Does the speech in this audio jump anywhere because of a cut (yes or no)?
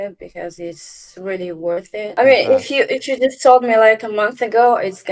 yes